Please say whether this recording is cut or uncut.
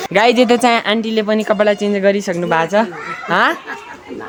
uncut